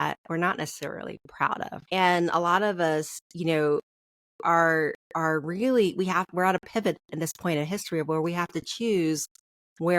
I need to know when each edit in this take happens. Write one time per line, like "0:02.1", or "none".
0:01.7